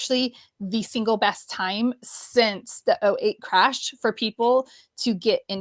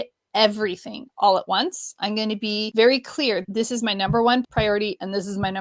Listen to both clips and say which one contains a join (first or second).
second